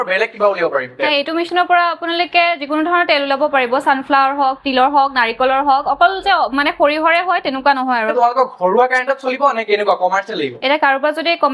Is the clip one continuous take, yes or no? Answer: yes